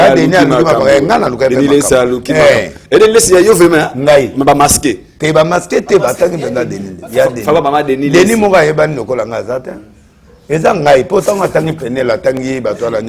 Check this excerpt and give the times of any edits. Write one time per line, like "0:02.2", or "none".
none